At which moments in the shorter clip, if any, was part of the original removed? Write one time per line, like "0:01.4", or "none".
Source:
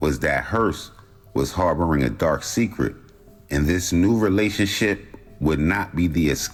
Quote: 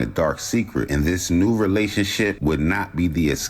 0:00.9
0:02.4